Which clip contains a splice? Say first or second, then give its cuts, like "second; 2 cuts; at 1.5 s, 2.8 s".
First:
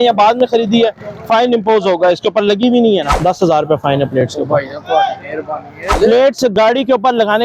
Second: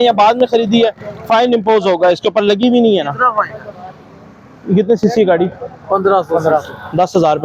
first; 2 cuts; at 3.1 s, 6.0 s